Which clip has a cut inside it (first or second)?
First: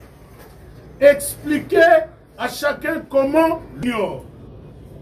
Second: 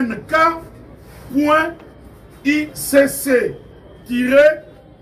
first